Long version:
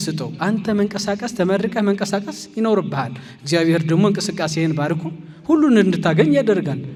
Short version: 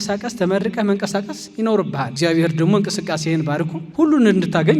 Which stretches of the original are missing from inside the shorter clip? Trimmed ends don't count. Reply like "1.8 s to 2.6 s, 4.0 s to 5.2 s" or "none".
3.0 s to 3.4 s, 5.1 s to 5.3 s